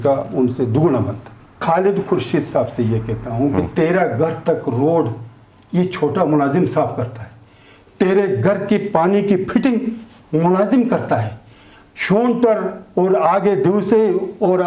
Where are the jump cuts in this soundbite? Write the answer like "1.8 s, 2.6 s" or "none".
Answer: 1.6 s